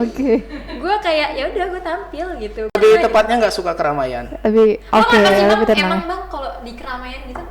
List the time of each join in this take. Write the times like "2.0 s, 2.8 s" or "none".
2.8 s